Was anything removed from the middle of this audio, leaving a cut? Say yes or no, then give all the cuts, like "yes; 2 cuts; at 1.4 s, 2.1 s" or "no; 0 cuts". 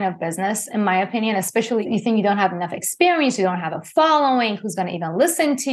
yes; 1 cut; at 1.8 s